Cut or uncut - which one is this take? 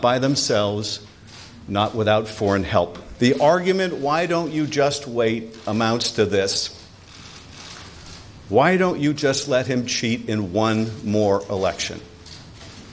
cut